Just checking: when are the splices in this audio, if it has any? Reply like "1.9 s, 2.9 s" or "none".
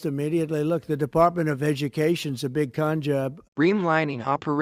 none